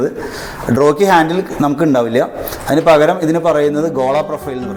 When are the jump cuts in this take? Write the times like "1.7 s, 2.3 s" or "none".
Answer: none